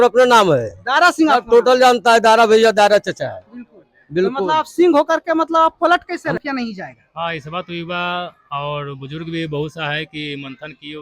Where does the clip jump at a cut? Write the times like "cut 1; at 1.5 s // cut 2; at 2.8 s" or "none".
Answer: cut 1; at 6.4 s